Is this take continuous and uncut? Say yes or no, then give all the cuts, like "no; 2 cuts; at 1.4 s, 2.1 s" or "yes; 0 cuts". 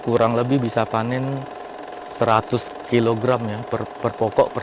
yes; 0 cuts